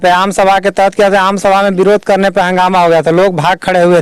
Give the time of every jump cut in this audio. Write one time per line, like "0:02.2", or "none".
none